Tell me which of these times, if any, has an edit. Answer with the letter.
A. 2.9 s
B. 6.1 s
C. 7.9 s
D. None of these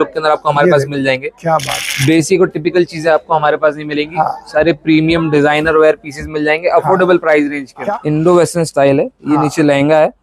C